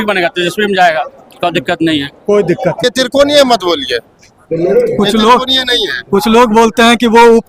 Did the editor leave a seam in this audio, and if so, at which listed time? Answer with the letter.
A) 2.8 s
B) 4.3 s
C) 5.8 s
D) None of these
A